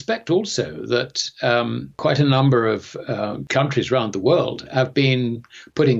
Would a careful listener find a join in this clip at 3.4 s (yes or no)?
yes